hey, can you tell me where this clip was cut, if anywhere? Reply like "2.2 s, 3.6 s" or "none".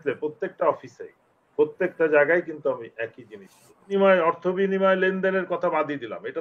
3.9 s